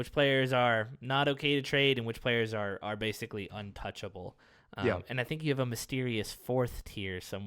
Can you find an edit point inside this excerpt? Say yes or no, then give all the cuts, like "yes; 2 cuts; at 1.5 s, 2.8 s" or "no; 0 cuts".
no; 0 cuts